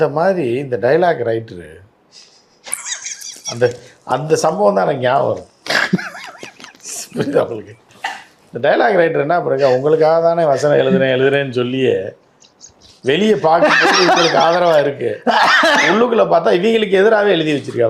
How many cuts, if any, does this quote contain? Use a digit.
0